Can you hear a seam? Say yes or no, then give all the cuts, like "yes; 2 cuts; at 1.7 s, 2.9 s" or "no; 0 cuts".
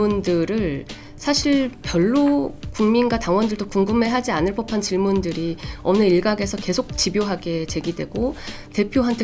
no; 0 cuts